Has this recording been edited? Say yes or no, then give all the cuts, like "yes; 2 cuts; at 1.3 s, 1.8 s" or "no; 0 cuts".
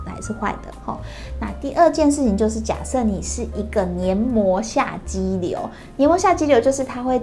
no; 0 cuts